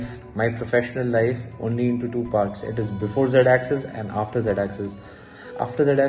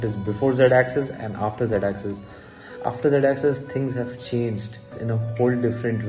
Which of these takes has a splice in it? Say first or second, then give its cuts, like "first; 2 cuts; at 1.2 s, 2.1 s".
second; 1 cut; at 4.9 s